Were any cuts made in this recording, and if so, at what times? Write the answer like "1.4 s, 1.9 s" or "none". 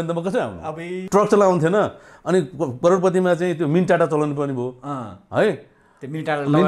1.0 s